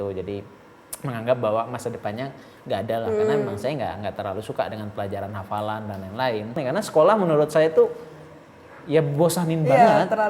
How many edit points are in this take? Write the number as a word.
one